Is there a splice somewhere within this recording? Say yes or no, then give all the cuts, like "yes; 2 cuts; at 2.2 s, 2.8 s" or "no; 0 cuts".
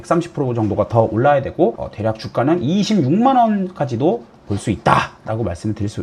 no; 0 cuts